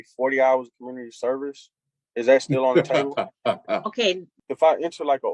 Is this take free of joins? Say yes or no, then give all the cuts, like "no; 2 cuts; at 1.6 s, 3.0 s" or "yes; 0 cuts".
no; 1 cut; at 4.3 s